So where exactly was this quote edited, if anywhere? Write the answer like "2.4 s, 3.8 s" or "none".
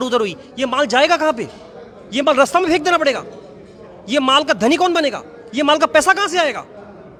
none